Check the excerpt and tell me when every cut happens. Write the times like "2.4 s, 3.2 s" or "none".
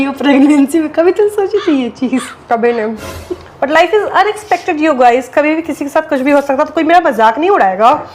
none

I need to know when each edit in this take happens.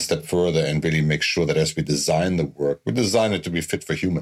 none

